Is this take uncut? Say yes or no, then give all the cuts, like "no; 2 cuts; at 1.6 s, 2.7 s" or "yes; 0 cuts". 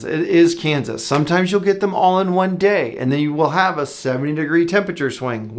yes; 0 cuts